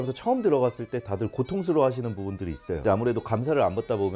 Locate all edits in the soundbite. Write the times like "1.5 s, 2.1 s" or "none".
none